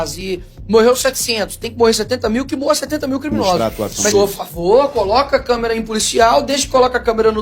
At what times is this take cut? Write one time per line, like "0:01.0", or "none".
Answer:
0:03.6